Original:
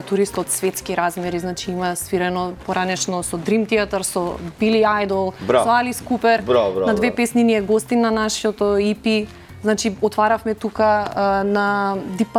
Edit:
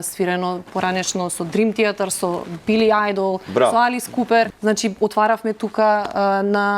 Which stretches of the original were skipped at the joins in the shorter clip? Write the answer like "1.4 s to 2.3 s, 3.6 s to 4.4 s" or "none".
6.4 s to 9.5 s

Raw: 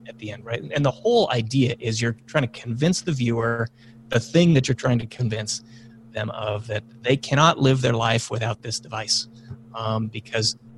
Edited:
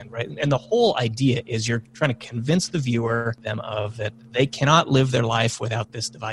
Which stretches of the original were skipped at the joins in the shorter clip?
3.7 s to 6.1 s

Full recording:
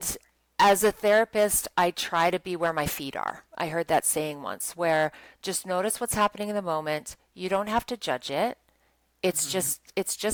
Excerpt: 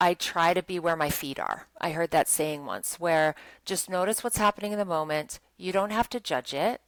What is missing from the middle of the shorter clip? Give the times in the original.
none

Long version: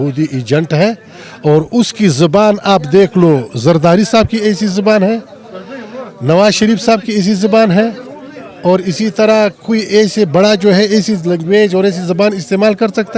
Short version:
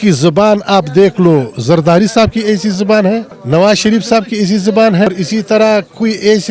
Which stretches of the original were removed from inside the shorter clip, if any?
5.3 s to 6.1 s, 7.8 s to 8.8 s

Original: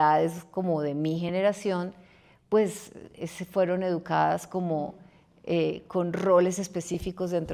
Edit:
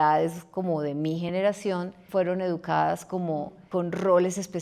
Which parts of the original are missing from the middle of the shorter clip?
2.0 s to 3.4 s, 5.0 s to 5.8 s

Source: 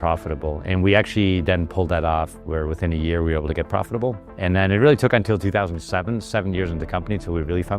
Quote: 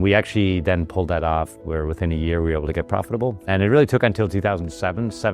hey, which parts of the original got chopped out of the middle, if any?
4.3 s to 4.6 s

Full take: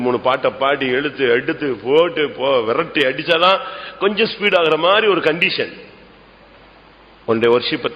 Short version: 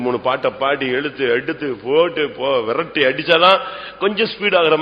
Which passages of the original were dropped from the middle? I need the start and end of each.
none

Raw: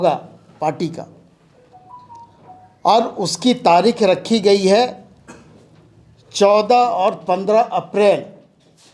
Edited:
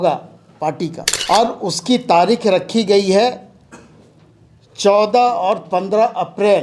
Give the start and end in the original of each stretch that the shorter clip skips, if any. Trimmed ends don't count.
1.1 s to 2.6 s

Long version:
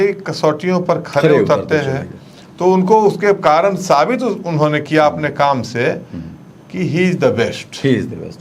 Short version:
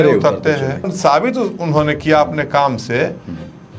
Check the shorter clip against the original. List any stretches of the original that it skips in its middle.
2.2 s to 3.8 s

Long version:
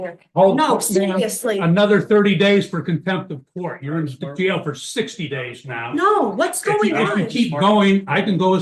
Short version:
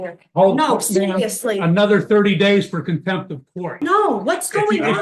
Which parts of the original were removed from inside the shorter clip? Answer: 3.6 s to 5.7 s

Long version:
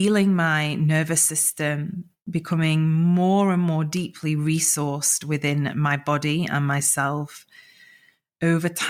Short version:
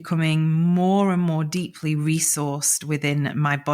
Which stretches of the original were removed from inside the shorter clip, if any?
none

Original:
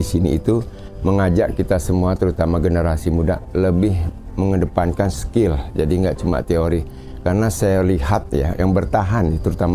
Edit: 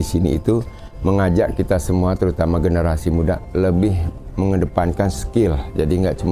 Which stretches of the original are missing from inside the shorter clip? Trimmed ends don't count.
none

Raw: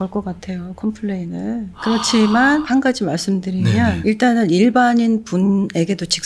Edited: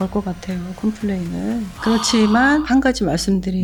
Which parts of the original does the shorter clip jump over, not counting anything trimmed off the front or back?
none

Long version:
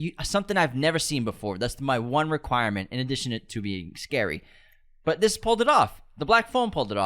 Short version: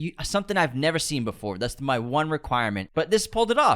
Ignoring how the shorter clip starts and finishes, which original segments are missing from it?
2.9 s to 5.0 s

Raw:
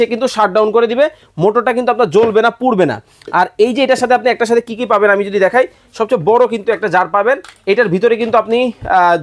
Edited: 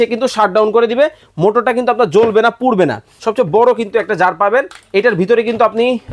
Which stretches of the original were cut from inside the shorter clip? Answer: 3.1 s to 5.9 s

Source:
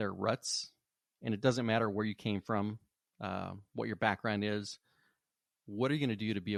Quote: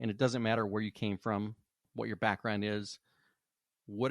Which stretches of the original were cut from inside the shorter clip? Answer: 3.0 s to 3.6 s

